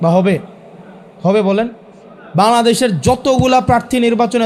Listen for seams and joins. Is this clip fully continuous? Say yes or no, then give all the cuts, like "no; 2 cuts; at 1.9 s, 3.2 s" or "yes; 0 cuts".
yes; 0 cuts